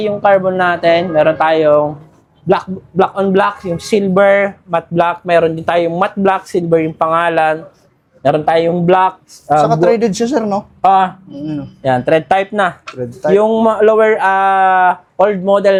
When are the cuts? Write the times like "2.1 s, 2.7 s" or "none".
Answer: none